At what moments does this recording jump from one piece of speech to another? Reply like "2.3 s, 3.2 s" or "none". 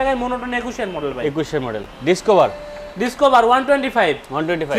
none